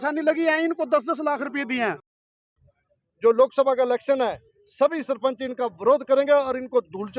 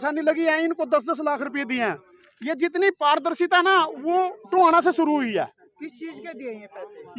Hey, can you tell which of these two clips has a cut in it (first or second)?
first